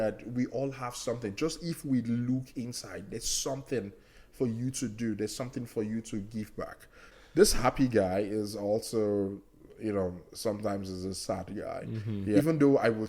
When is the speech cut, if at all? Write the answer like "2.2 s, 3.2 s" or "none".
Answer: 7.1 s, 12.4 s